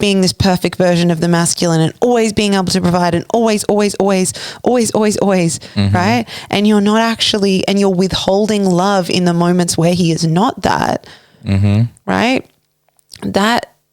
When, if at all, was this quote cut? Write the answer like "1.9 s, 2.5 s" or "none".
none